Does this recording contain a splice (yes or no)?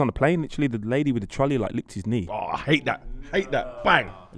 no